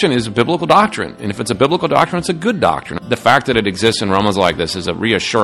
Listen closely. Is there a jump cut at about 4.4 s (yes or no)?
no